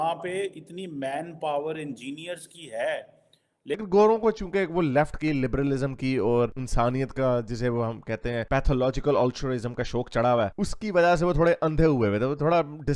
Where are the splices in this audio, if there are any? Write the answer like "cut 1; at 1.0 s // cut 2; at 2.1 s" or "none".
cut 1; at 3.8 s